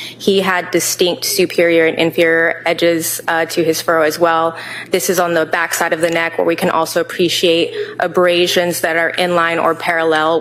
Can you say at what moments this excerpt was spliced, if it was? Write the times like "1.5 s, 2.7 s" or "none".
none